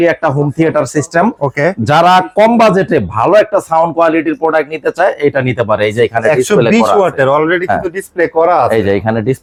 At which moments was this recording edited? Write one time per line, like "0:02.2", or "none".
none